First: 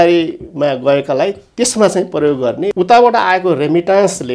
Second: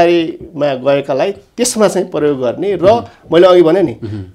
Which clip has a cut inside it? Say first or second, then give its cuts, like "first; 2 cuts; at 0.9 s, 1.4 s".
first; 1 cut; at 2.7 s